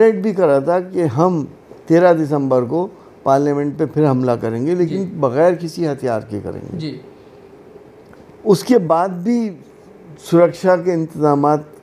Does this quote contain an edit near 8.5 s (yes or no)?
no